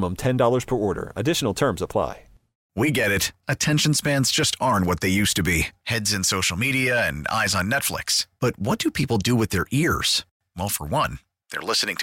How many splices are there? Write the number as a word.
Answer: one